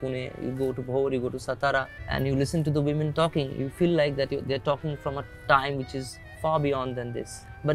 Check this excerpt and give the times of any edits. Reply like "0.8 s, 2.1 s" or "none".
2.0 s